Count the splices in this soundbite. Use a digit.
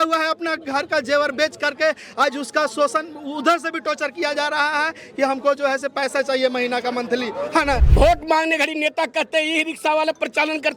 1